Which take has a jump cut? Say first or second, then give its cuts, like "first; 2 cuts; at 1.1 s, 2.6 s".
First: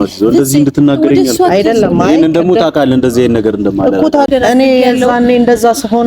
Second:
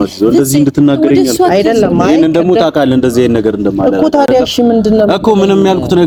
first; 1 cut; at 4.3 s